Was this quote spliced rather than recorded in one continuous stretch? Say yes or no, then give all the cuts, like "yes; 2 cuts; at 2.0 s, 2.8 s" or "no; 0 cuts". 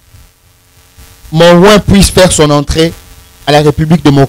no; 0 cuts